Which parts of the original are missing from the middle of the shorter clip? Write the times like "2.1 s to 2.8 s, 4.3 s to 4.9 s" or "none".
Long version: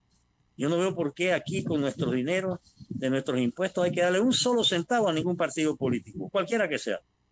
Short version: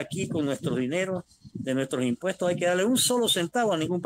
none